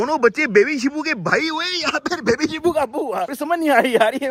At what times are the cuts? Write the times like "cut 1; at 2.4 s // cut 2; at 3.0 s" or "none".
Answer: none